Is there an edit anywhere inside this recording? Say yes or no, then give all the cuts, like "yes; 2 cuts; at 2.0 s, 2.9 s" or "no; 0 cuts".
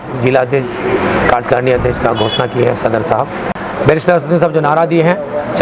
yes; 1 cut; at 3.5 s